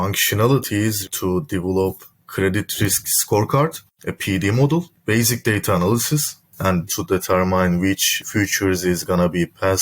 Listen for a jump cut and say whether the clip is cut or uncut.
cut